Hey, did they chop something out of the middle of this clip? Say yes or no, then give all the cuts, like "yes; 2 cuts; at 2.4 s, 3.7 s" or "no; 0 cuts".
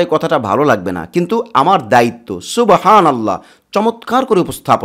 no; 0 cuts